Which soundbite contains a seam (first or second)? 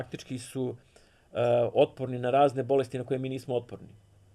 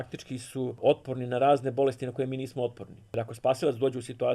second